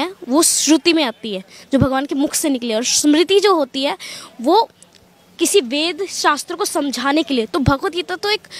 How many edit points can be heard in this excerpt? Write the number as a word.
zero